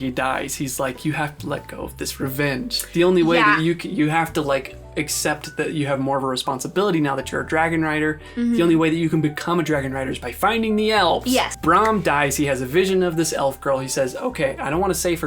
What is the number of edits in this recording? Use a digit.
1